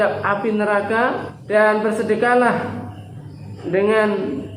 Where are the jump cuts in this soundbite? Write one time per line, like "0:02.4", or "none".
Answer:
0:01.3